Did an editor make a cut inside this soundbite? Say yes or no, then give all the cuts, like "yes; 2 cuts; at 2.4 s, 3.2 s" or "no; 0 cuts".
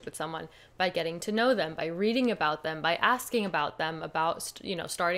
no; 0 cuts